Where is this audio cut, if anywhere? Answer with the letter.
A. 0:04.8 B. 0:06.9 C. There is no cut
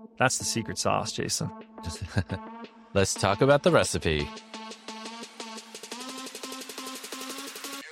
A